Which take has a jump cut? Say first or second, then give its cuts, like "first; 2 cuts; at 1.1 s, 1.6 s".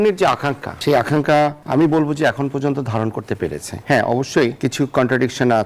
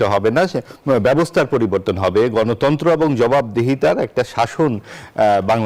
first; 4 cuts; at 0.8 s, 1.6 s, 3.7 s, 4.6 s